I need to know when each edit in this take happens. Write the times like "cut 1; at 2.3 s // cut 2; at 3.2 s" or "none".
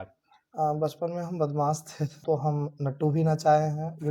cut 1; at 2.2 s